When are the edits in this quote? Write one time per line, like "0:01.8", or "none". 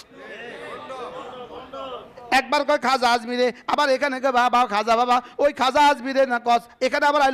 none